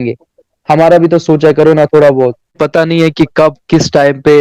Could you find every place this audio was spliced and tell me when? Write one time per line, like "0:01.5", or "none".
0:02.6